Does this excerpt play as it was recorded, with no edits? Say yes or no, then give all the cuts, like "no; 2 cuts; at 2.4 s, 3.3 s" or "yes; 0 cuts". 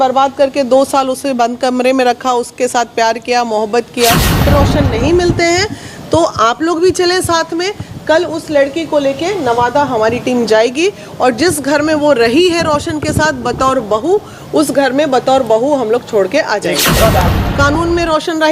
no; 2 cuts; at 4.5 s, 17.3 s